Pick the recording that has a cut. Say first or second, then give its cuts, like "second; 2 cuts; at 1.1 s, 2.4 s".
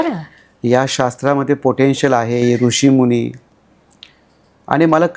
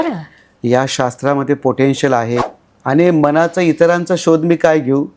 second; 1 cut; at 2.4 s